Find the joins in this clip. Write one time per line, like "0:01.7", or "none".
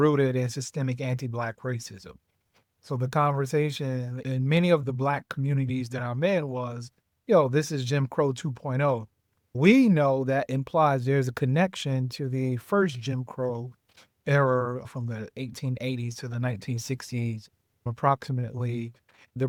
none